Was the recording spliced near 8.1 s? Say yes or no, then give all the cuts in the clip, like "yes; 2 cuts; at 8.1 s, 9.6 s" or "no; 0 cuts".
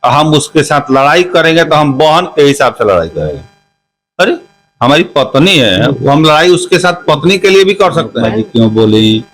yes; 1 cut; at 8.1 s